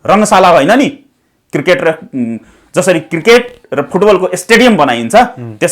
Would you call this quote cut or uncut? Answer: uncut